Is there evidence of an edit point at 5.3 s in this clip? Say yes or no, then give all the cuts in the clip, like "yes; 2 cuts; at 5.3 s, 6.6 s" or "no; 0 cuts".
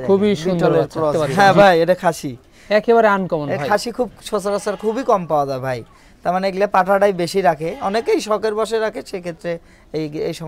no; 1 cut; at 1.1 s